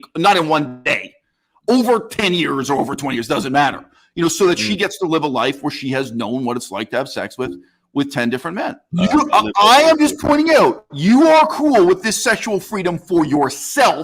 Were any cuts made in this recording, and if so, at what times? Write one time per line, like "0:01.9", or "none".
0:08.8